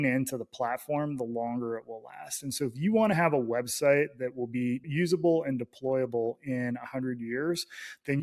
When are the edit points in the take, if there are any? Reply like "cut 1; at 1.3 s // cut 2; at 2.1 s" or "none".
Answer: none